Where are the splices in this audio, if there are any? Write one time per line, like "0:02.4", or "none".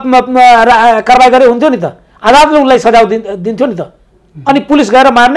none